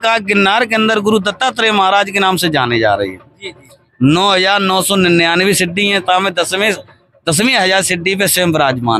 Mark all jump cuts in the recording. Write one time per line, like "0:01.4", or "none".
none